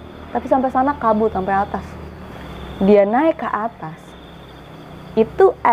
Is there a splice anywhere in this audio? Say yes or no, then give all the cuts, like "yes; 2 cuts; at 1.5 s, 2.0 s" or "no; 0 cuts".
yes; 1 cut; at 2.2 s